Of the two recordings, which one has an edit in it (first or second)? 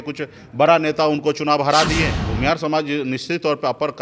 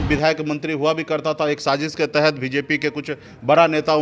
first